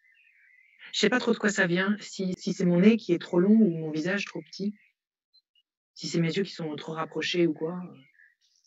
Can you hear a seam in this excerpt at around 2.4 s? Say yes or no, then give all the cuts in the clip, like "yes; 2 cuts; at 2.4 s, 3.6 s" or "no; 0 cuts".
yes; 1 cut; at 2.4 s